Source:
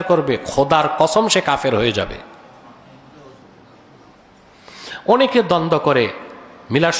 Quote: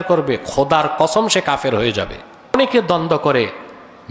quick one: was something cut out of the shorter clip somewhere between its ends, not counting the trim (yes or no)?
yes